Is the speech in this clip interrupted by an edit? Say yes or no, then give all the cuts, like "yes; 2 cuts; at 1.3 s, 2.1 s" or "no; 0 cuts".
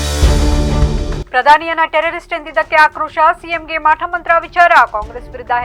no; 0 cuts